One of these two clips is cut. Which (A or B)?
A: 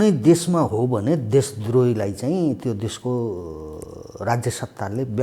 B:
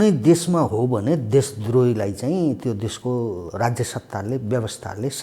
B